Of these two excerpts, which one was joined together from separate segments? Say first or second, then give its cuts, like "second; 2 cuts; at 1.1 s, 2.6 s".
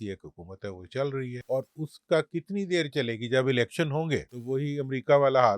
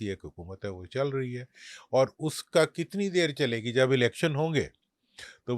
first; 2 cuts; at 1.4 s, 4.4 s